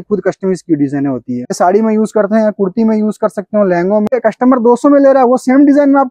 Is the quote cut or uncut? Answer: cut